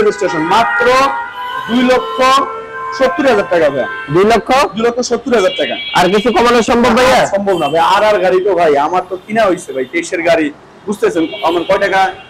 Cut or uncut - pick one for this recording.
uncut